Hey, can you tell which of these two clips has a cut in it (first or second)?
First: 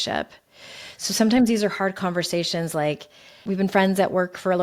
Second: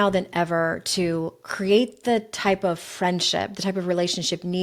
first